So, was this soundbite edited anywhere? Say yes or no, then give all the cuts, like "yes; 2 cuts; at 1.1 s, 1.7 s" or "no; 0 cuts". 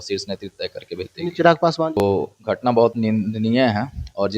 yes; 1 cut; at 2.0 s